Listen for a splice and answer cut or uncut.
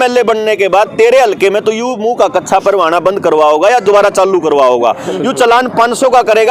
uncut